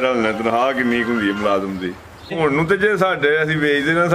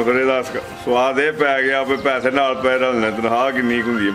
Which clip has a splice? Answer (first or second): first